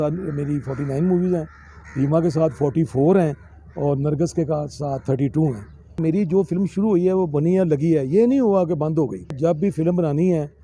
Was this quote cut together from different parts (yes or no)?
yes